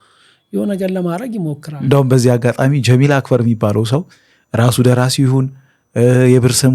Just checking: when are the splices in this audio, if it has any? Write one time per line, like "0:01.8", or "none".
0:01.7